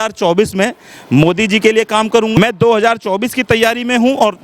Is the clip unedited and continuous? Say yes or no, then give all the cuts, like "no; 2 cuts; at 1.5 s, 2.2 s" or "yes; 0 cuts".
no; 1 cut; at 2.4 s